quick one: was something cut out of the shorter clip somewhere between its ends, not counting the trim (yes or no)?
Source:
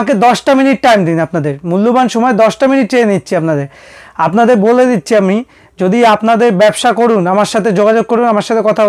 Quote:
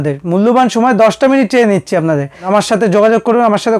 yes